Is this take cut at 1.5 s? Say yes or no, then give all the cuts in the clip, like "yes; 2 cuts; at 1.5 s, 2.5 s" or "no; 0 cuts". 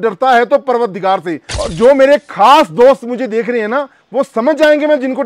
yes; 1 cut; at 1.5 s